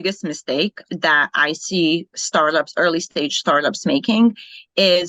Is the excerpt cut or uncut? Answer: uncut